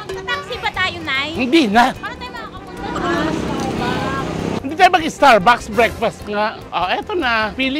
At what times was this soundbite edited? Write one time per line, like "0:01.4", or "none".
none